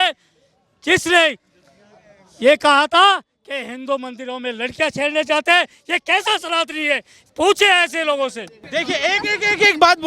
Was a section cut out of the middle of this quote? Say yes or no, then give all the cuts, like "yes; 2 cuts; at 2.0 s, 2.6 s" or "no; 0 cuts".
yes; 1 cut; at 8.5 s